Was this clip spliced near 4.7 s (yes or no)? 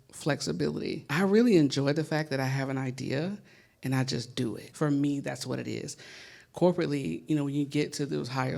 yes